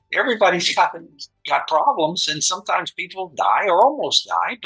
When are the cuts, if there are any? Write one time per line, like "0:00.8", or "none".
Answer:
none